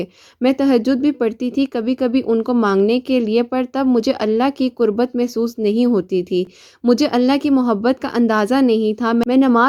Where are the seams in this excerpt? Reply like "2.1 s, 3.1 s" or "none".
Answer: none